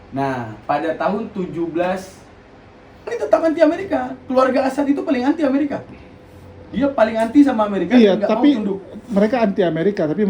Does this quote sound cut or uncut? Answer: cut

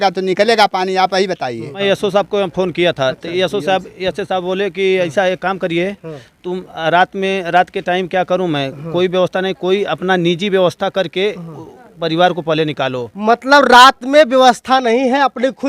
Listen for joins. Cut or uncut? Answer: cut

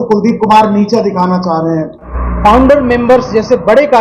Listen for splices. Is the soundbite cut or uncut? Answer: cut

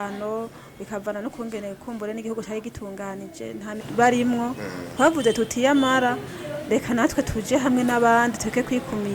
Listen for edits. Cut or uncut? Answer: cut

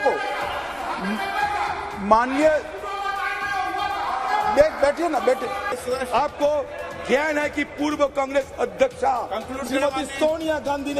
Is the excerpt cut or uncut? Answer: cut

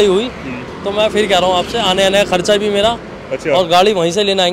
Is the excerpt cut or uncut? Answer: uncut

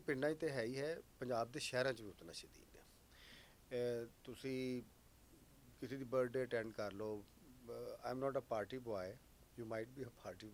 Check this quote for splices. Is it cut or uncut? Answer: uncut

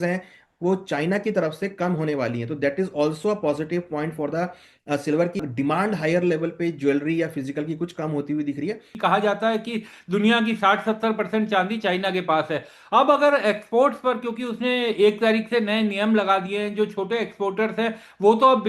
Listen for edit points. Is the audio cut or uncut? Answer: cut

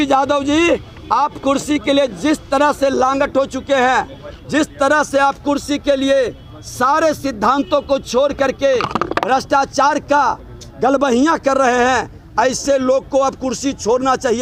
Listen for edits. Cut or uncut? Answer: uncut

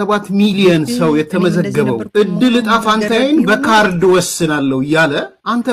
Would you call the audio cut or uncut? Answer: cut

